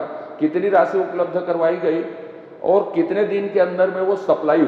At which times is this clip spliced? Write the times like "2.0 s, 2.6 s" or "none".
none